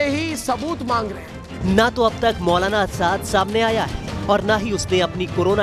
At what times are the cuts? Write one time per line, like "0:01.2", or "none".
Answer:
0:01.6

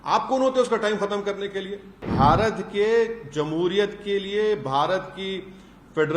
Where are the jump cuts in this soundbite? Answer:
0:02.0

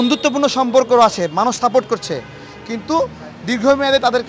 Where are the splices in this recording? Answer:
none

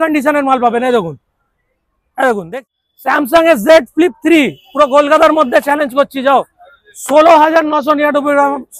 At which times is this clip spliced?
0:02.6

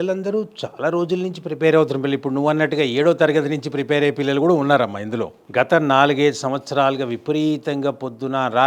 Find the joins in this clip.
0:05.4

